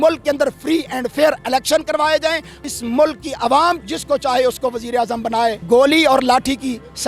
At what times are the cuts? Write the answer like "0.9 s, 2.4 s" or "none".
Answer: 2.7 s, 3.8 s